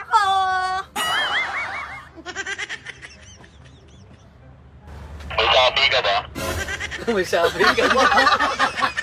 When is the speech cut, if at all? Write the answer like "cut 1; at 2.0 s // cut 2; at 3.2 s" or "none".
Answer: none